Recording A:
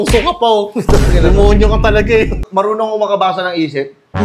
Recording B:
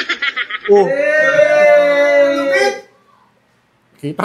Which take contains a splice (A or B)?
A